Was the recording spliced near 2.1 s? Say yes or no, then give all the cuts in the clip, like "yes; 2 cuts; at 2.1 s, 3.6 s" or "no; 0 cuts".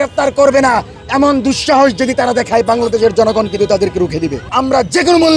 no; 1 cut; at 4.4 s